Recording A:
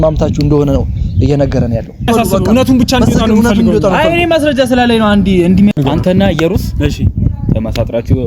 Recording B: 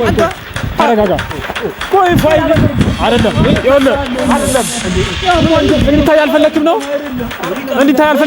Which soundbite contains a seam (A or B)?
A